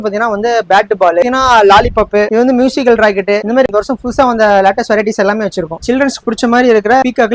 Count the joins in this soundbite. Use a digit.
2